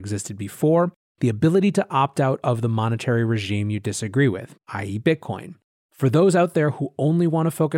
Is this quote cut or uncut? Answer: uncut